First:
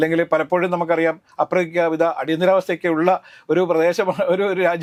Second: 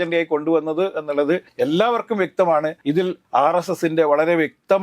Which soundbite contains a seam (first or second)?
second